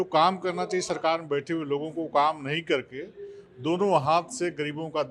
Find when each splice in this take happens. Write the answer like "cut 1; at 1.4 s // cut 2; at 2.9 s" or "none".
none